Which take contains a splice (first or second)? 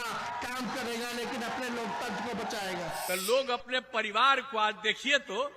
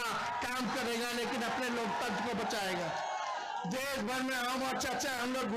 first